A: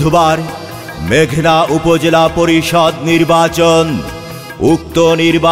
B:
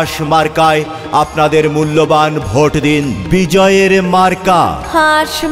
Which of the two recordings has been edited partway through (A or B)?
B